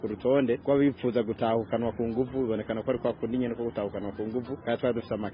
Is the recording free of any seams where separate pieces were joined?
yes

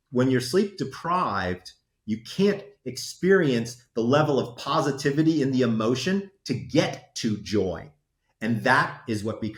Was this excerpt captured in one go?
yes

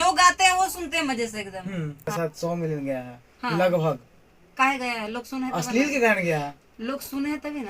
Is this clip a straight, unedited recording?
no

